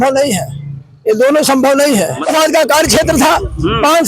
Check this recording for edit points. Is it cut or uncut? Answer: cut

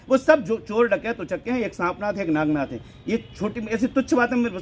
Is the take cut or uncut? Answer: uncut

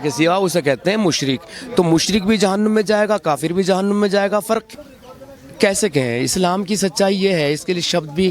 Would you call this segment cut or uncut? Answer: cut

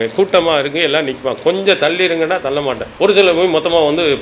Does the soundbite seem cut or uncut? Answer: cut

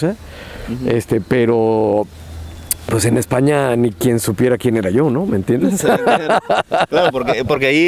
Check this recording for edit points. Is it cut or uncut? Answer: uncut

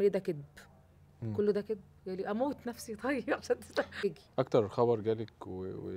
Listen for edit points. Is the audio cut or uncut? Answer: cut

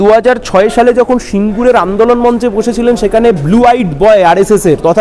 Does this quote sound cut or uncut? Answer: uncut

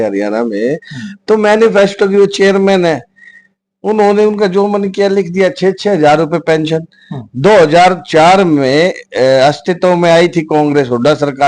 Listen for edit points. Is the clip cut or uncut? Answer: uncut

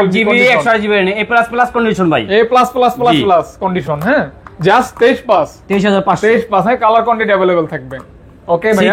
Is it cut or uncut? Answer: uncut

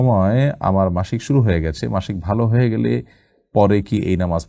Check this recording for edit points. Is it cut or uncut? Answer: uncut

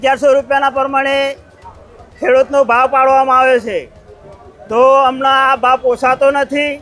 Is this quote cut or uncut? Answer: uncut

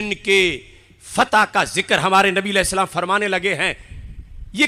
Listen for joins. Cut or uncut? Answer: uncut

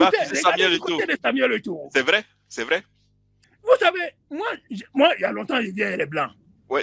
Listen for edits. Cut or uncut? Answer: cut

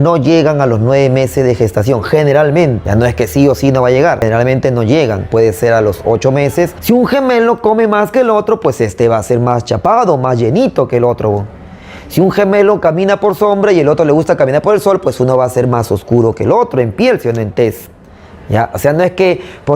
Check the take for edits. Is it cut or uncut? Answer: cut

